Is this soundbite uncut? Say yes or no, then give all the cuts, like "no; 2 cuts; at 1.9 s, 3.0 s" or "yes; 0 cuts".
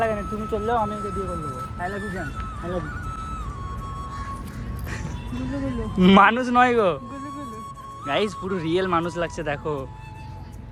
yes; 0 cuts